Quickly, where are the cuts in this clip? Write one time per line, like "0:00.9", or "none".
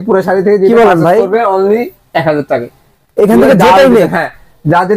none